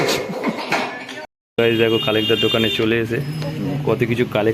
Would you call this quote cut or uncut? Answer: cut